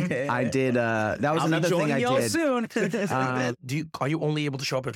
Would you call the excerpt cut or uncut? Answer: cut